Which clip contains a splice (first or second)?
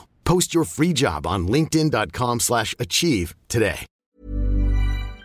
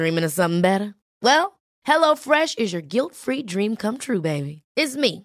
first